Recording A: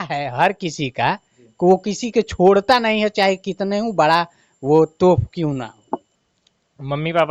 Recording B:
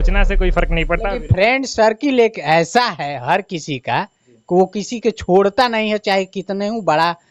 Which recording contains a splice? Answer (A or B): A